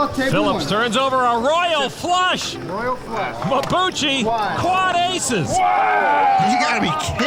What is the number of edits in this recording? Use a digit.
0